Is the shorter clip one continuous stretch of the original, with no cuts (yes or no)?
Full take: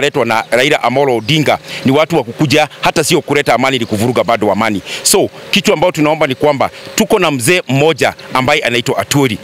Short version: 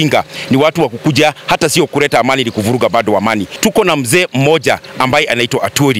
no